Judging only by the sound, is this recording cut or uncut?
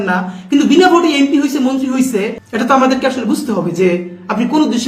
cut